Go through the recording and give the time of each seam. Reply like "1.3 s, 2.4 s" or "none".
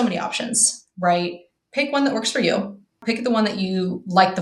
3.0 s

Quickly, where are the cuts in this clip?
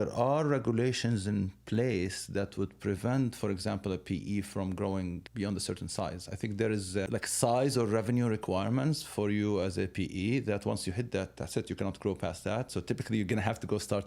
5.2 s, 7.1 s

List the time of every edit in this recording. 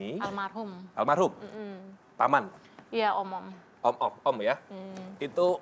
none

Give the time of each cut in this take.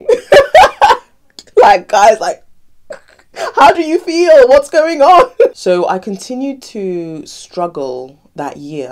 5.6 s

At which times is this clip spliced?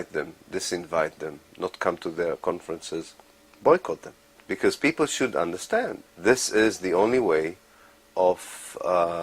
3.8 s

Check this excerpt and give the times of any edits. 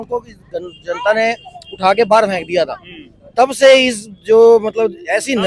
none

